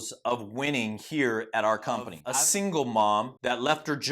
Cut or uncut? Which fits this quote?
cut